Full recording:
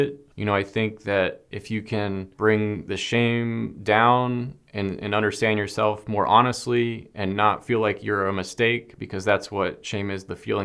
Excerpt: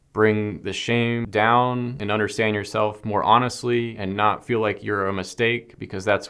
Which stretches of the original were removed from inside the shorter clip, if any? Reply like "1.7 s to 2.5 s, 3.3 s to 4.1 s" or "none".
3.5 s to 3.8 s, 4.5 s to 5.0 s, 7.0 s to 7.2 s

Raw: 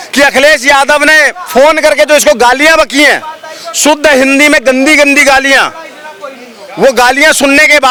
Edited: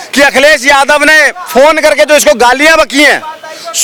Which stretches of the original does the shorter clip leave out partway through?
none

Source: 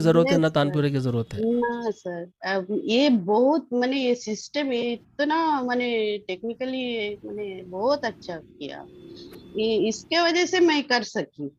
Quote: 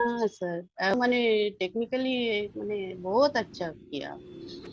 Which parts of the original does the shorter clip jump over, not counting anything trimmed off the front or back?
2.5 s to 5.6 s

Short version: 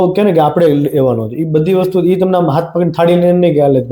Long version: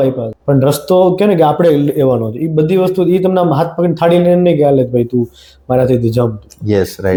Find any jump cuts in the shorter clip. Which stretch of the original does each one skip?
none

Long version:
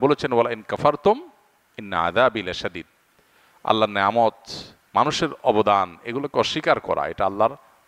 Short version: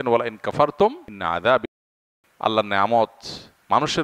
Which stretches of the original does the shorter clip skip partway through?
1.4 s to 1.8 s, 2.5 s to 3.0 s

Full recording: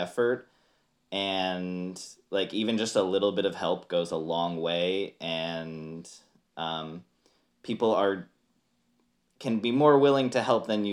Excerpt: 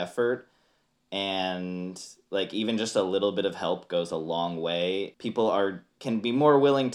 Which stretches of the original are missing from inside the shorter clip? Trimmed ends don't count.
5.1 s to 7.6 s, 8.3 s to 9.3 s

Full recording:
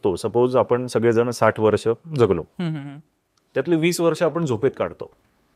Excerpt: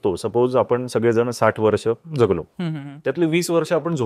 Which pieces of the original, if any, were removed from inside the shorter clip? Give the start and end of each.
2.8 s to 3.3 s

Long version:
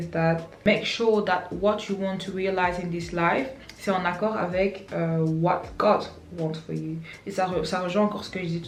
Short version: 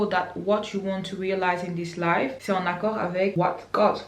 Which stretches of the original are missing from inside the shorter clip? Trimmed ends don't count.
3.5 s to 3.8 s, 4.7 s to 5.4 s

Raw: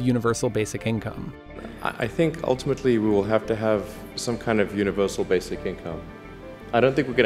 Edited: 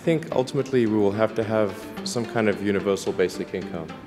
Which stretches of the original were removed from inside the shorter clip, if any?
none

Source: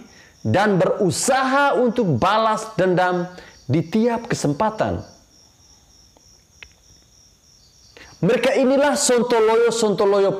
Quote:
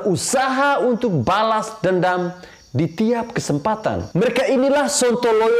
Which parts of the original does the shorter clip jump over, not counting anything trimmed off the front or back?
5.0 s to 8.1 s

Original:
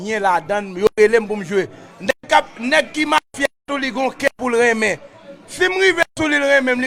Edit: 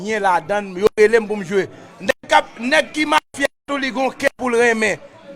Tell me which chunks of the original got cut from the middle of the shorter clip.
none

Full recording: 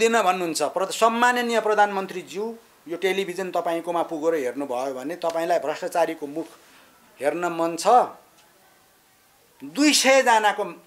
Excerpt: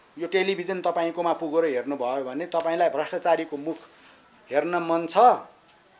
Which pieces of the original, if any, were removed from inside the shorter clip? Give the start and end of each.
none

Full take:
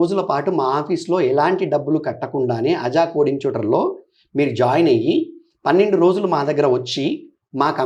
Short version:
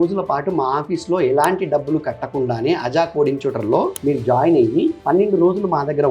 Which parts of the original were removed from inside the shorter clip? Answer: 4.0 s to 4.3 s, 5.3 s to 5.6 s

